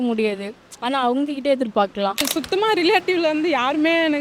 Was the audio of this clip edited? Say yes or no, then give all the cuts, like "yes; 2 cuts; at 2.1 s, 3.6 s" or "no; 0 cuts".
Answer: yes; 1 cut; at 2.2 s